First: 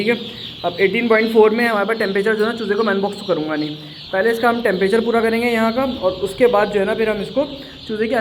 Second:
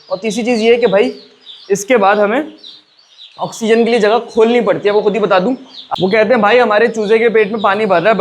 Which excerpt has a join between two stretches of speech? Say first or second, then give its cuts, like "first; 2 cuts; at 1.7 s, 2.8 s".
second; 1 cut; at 5.9 s